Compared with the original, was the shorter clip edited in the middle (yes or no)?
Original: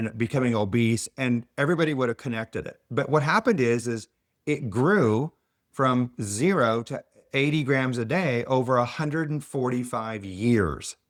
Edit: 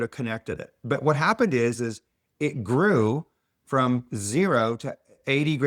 no